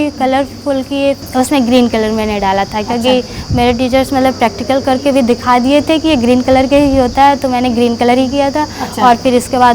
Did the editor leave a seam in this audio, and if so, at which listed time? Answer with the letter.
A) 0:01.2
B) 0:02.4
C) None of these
A